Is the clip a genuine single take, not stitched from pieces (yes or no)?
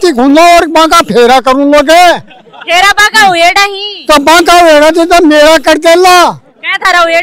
yes